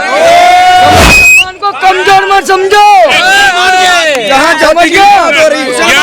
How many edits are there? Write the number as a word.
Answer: one